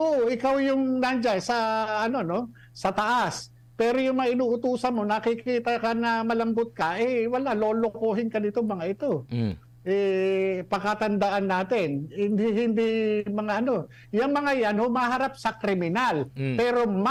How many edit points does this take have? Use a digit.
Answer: 0